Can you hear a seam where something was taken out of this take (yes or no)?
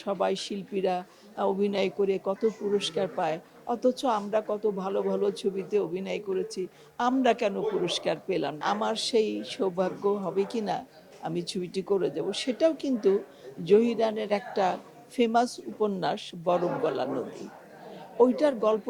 yes